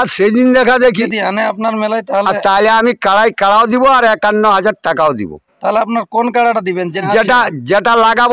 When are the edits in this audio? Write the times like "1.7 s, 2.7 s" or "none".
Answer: 1.1 s, 7.0 s